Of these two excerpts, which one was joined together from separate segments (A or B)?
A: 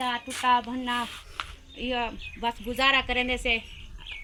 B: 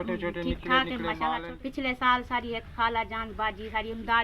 B